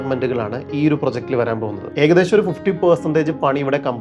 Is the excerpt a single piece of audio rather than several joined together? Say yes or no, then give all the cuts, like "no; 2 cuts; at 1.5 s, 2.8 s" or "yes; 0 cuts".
yes; 0 cuts